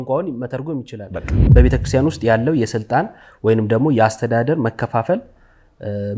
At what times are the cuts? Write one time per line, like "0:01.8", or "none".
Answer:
0:01.5